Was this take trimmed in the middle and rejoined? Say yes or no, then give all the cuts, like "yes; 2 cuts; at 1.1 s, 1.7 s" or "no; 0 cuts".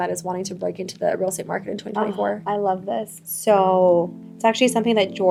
no; 0 cuts